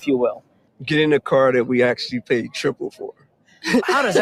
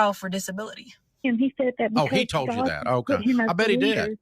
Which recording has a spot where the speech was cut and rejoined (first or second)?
second